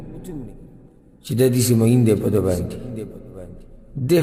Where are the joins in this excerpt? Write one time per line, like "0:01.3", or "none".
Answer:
none